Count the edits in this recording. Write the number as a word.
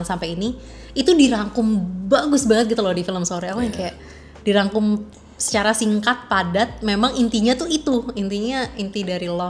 zero